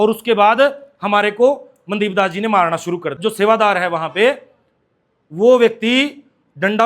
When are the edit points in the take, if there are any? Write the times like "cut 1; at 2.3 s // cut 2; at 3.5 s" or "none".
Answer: cut 1; at 3.2 s

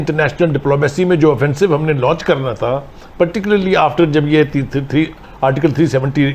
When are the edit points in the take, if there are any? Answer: none

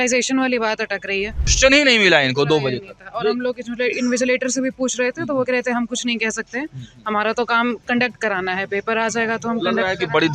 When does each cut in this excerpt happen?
cut 1; at 1.5 s

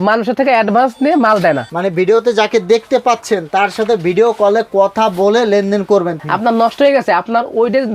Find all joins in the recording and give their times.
cut 1; at 1.7 s // cut 2; at 6.1 s

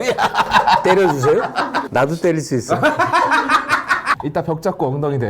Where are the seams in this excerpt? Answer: cut 1; at 1.9 s // cut 2; at 4.2 s

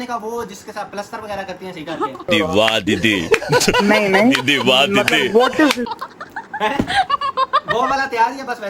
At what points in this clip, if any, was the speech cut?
none

